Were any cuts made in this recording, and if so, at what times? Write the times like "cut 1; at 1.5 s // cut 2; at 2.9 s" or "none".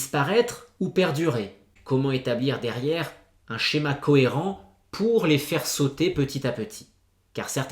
cut 1; at 1.7 s